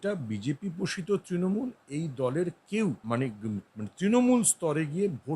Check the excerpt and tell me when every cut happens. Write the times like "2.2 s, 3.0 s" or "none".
3.0 s